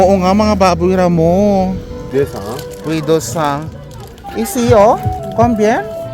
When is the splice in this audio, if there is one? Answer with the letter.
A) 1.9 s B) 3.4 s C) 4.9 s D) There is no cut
A